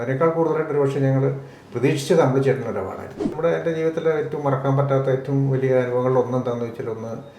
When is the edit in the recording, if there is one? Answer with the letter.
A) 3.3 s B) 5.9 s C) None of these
A